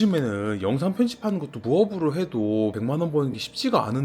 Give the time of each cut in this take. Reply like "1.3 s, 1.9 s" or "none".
none